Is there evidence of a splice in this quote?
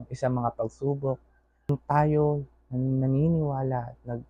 yes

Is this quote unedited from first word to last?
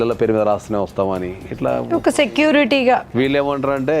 no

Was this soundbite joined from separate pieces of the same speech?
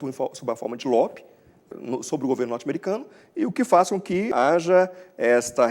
yes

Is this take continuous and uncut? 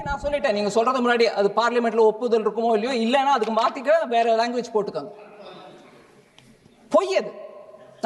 yes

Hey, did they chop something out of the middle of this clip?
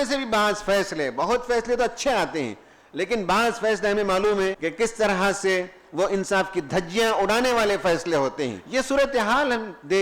yes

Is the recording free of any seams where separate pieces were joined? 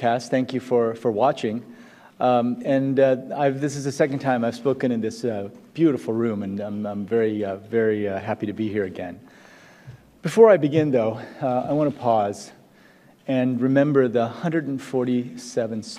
yes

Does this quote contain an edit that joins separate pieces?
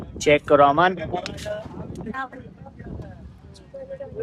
no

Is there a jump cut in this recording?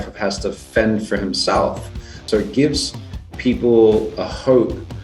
yes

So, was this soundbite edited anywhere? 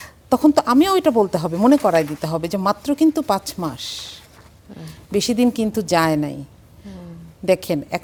no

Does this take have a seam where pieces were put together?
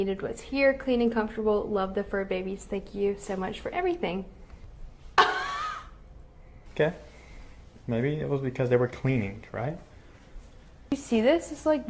yes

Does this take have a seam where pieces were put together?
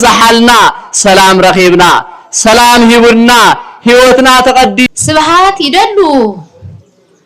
yes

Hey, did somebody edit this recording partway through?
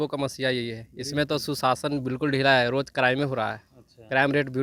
no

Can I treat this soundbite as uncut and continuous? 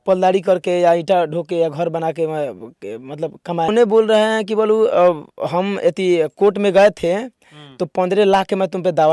no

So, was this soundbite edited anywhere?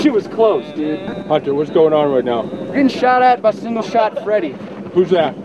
yes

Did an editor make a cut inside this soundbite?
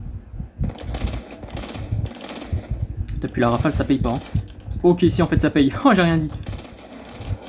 no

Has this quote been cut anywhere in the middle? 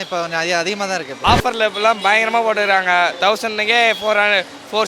yes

